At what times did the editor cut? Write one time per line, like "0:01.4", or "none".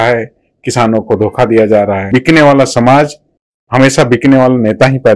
0:02.1